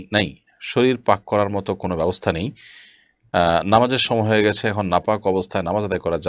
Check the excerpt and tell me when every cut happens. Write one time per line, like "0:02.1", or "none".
none